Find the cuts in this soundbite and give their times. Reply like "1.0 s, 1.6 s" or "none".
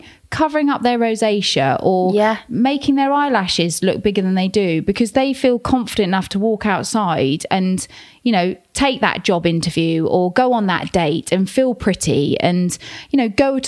none

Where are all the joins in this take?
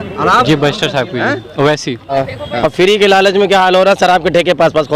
2.1 s

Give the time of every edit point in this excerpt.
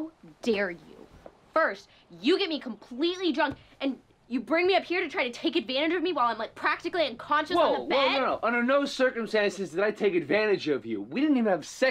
none

